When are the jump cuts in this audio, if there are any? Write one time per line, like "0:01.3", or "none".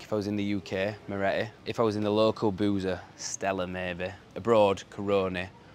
0:01.6
0:04.3